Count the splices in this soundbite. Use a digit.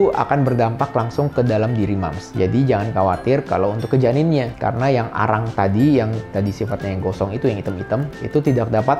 0